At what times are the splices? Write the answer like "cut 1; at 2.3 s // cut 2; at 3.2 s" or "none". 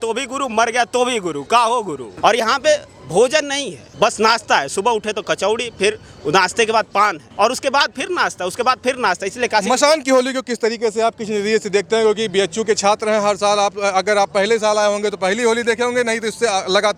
none